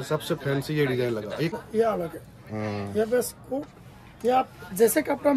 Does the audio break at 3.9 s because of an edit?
no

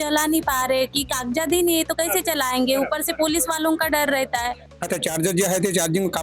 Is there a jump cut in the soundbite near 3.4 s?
no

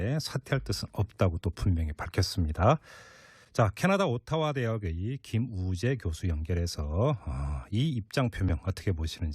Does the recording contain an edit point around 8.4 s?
yes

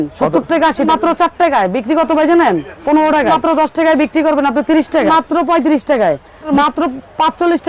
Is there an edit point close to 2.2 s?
no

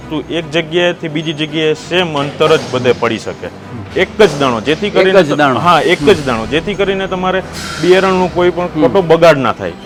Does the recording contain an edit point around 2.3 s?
no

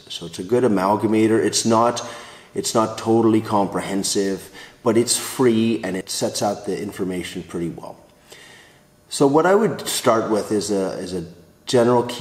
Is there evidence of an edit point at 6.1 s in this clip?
yes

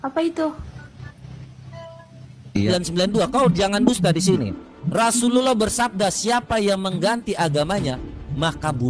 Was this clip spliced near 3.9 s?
no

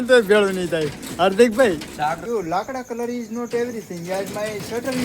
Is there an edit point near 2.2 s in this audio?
yes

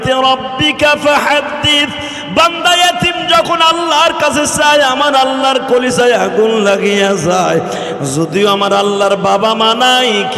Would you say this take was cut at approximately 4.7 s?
no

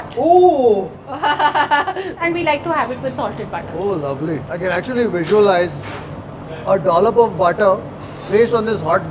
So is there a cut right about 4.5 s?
yes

